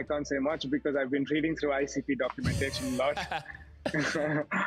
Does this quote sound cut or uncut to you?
uncut